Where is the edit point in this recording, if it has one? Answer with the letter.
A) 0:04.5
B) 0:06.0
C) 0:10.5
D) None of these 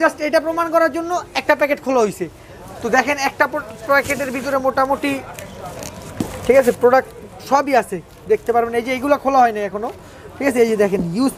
D